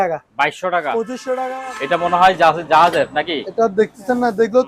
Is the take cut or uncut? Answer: cut